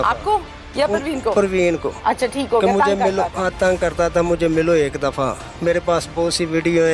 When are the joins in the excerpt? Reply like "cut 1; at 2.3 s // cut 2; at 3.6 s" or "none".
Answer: cut 1; at 1.9 s